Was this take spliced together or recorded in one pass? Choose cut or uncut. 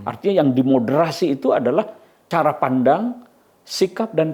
cut